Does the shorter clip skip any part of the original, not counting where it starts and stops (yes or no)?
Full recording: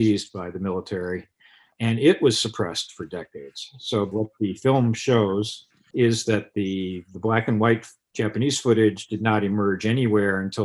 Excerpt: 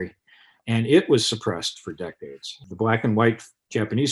yes